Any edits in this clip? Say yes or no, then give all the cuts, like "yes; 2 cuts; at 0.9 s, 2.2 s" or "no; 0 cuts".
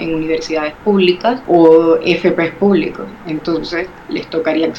yes; 1 cut; at 1.4 s